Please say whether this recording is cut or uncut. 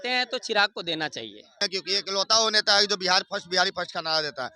cut